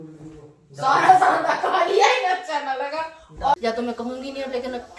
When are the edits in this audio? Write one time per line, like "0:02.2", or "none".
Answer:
0:03.6